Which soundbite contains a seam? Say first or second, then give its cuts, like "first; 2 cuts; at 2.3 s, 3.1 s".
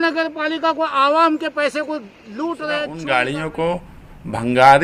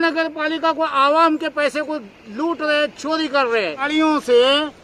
first; 1 cut; at 2.9 s